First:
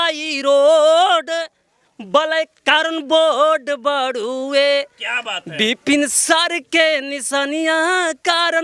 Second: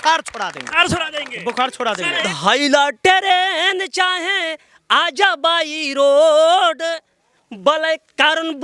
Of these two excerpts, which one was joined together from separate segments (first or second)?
second